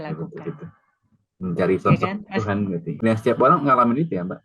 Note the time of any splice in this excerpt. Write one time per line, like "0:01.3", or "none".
0:02.9

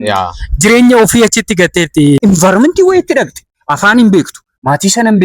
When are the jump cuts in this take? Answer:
0:02.2

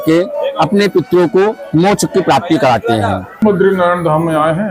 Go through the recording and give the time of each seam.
0:03.3

